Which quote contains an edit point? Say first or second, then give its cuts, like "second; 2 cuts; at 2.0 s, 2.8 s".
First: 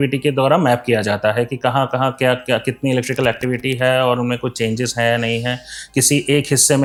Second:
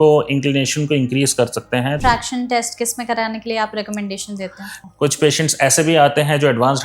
second; 2 cuts; at 2.0 s, 4.7 s